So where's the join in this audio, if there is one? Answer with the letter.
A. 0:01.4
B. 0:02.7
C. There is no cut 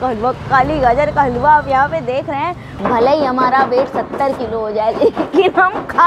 B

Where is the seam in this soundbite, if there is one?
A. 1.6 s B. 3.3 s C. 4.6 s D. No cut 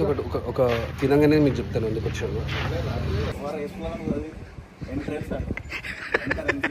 B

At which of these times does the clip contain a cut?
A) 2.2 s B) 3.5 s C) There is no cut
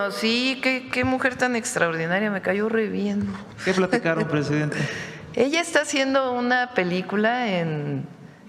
B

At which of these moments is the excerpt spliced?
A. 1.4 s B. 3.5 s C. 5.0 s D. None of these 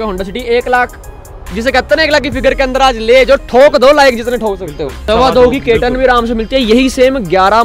C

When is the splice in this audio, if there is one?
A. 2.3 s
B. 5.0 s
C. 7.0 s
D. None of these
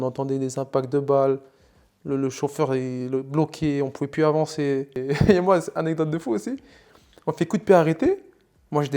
B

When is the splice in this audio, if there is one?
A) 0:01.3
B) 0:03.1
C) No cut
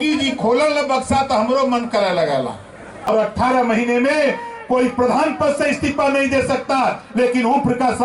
B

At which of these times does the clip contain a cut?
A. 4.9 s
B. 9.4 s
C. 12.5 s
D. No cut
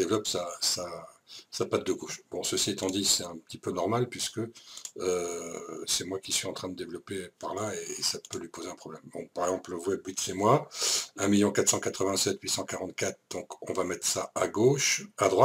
B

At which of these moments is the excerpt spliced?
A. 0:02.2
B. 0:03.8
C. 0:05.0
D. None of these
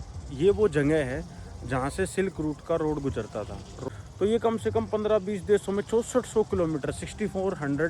B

